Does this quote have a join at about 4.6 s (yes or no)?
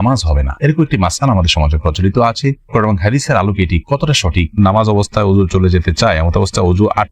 yes